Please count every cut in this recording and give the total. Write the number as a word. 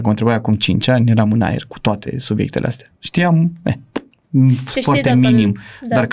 zero